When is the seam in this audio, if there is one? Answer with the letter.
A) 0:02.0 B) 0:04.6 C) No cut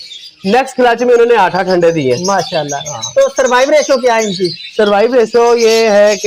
C